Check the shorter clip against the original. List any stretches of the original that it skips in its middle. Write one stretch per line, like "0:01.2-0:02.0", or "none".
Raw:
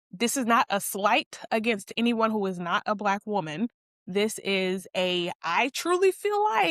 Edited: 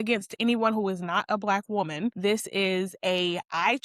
0:03.7-0:04.1